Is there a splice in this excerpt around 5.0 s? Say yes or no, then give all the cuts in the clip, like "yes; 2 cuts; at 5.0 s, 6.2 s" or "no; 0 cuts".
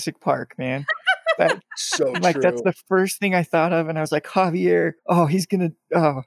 yes; 1 cut; at 5.0 s